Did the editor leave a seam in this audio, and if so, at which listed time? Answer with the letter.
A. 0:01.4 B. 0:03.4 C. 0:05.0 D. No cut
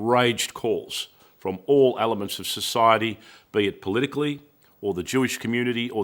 D